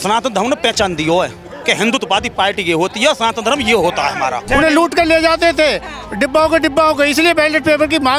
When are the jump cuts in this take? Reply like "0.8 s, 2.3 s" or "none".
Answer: 4.4 s